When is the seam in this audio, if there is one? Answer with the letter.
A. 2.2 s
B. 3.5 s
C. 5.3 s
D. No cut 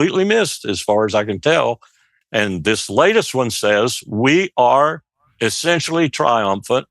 A